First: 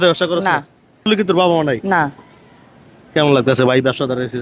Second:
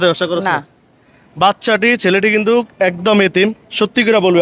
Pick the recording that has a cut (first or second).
first